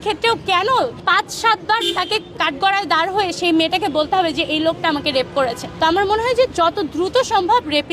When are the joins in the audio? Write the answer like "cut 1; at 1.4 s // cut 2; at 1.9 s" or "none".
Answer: cut 1; at 1.0 s // cut 2; at 2.4 s // cut 3; at 5.6 s